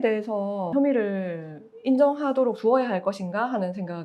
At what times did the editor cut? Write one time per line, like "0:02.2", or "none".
none